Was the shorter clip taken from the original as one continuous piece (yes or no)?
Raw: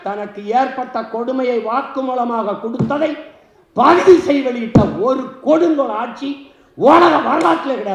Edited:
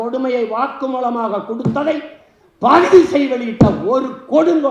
yes